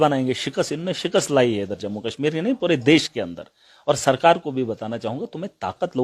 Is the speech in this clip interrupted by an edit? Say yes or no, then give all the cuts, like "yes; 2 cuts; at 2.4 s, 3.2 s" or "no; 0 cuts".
no; 0 cuts